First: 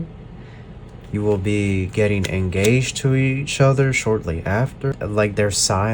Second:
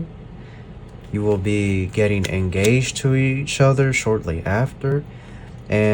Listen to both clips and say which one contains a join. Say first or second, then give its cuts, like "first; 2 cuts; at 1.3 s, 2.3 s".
first; 1 cut; at 4.9 s